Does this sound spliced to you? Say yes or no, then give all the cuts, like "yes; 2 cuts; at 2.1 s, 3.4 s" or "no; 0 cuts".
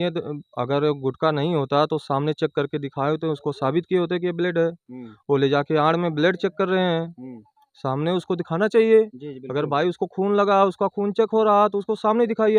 no; 0 cuts